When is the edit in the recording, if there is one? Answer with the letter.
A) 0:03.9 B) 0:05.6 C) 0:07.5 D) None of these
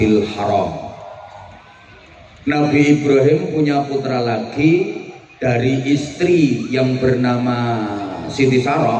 D